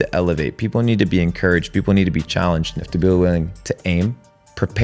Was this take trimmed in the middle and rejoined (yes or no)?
yes